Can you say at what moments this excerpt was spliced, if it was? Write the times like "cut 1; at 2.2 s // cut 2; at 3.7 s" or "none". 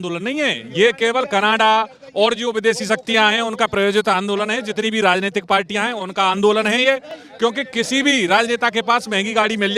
none

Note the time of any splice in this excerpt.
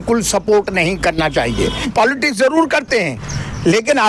cut 1; at 1.9 s

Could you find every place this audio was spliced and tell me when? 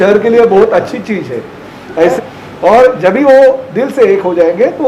cut 1; at 2.1 s

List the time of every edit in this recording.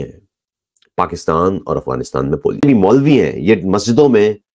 cut 1; at 2.6 s

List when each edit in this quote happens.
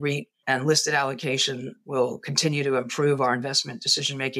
none

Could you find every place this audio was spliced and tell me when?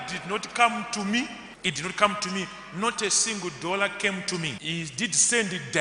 cut 1; at 1.5 s // cut 2; at 4.6 s

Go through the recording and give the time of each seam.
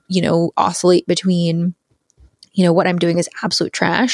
none

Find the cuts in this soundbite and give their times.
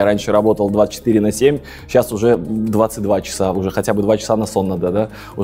none

